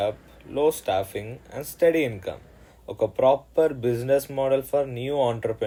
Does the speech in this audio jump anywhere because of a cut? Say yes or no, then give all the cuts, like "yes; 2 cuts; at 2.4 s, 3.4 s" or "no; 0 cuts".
no; 0 cuts